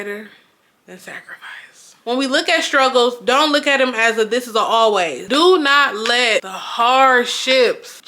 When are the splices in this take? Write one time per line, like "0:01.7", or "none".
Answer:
0:02.0
0:05.2